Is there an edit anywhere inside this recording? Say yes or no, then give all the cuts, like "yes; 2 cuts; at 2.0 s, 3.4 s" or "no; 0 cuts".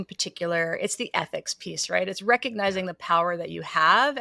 no; 0 cuts